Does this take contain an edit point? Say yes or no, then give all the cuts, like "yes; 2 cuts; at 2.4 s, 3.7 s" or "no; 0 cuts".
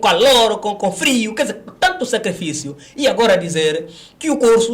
no; 0 cuts